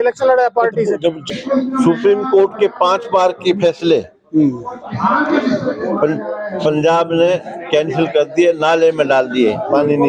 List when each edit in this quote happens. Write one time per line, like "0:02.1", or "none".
0:01.2

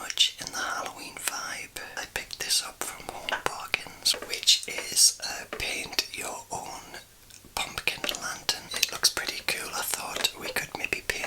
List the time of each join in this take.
0:02.0
0:04.1
0:08.6

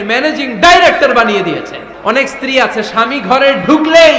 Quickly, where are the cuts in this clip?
0:01.8

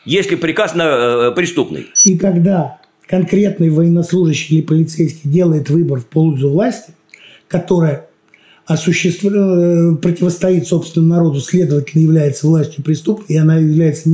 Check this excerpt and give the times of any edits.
0:01.8

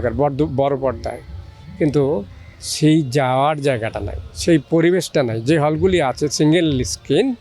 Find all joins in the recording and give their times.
none

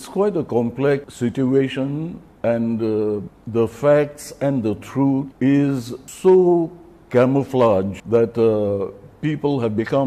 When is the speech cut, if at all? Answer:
0:01.1
0:02.2
0:03.3
0:05.3
0:06.0
0:08.0

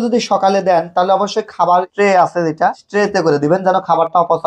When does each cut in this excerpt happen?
0:01.9
0:02.8

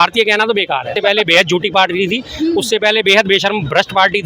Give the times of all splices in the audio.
0:00.9

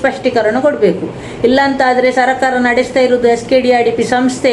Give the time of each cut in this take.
none

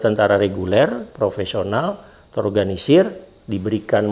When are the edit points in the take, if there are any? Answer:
none

